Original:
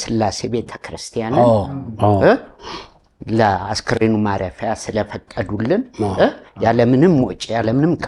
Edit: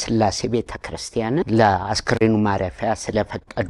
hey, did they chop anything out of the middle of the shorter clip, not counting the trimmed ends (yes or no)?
yes